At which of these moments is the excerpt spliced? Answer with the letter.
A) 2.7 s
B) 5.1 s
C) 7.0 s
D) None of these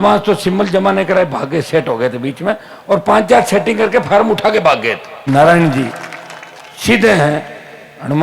B